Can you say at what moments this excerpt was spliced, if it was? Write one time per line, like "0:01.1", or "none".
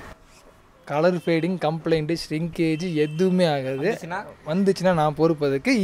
none